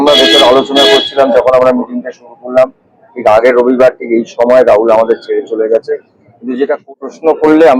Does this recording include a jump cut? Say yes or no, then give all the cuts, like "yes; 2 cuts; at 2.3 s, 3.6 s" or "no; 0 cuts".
yes; 1 cut; at 6.9 s